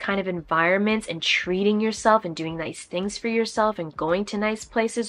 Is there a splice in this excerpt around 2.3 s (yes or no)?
no